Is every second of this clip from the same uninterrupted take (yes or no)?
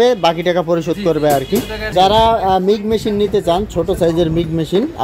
no